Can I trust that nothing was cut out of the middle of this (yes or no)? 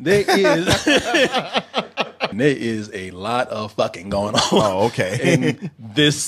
no